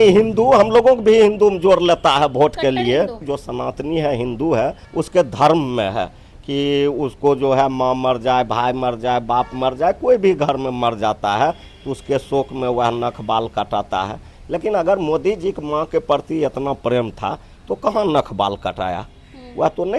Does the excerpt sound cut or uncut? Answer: cut